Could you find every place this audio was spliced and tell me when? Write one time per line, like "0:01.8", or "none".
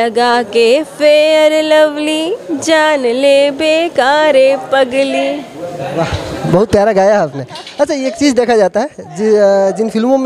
none